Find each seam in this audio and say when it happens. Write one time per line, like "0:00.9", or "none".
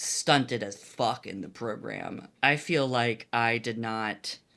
none